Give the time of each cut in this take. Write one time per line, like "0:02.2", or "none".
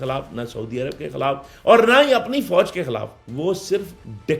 none